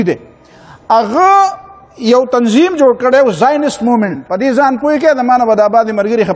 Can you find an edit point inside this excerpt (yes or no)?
yes